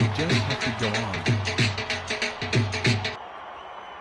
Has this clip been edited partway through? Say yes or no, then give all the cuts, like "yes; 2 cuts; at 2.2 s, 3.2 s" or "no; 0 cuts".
no; 0 cuts